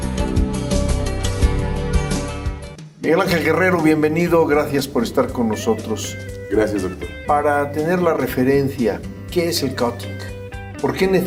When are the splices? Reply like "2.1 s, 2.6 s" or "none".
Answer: none